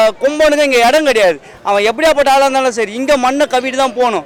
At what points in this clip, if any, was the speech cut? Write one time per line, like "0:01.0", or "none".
none